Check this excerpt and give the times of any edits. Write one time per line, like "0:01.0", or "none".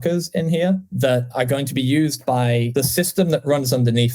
0:01.3
0:02.7